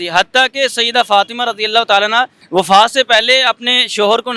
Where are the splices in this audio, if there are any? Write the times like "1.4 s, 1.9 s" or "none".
2.4 s